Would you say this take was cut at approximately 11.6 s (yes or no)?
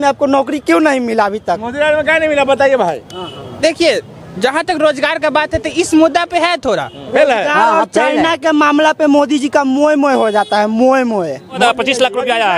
yes